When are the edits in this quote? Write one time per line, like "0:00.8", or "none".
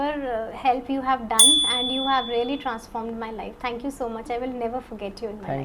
none

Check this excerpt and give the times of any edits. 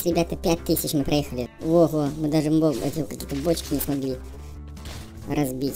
0:01.4

